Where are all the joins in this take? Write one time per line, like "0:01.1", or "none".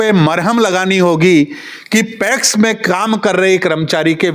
none